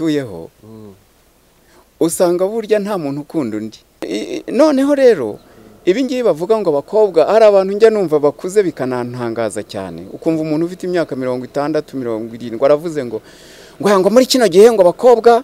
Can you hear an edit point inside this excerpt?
yes; 1 cut; at 4.0 s

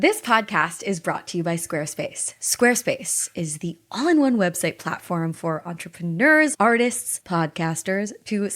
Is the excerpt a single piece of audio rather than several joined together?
yes; 0 cuts

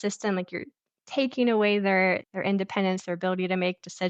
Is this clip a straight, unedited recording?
no; 1 cut; at 2.2 s

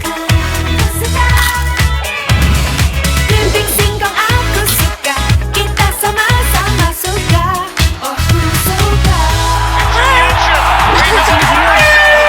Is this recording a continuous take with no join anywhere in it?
yes; 0 cuts

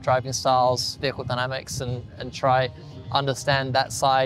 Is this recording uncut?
yes; 0 cuts

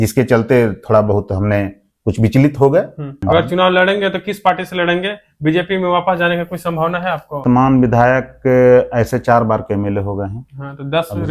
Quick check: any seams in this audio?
yes; 2 cuts; at 3.1 s, 7.4 s

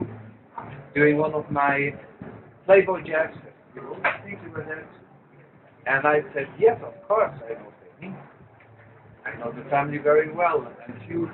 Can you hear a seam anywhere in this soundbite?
no; 0 cuts

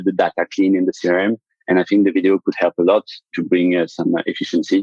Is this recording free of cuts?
no; 1 cut; at 3.3 s

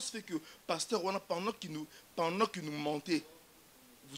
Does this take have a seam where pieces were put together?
no; 0 cuts

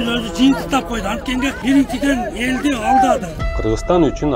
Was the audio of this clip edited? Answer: yes; 2 cuts; at 1.6 s, 3.4 s

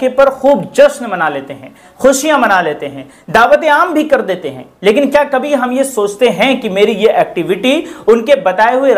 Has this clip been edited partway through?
no; 0 cuts

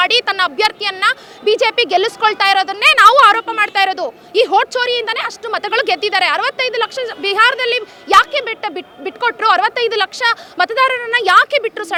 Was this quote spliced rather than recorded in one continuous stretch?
no; 0 cuts

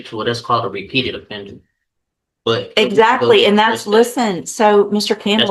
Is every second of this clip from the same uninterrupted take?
yes; 0 cuts

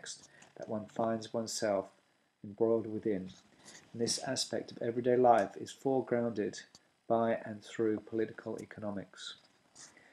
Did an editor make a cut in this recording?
yes; 1 cut; at 7.7 s

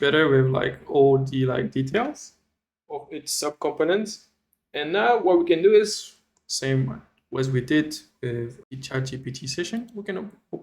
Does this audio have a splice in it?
yes; 1 cut; at 8.6 s

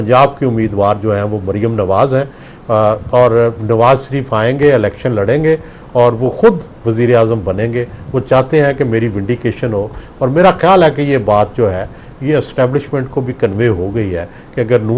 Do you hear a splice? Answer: no; 0 cuts

